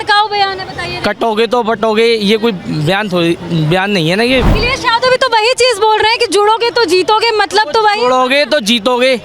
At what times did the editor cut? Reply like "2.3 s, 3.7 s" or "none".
4.6 s